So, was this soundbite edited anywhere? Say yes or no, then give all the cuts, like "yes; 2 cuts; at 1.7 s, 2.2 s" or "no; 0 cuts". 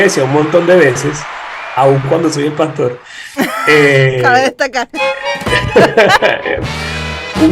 yes; 1 cut; at 4.9 s